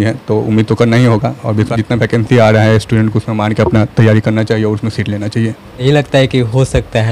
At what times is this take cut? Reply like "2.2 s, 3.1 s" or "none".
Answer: 1.7 s, 5.8 s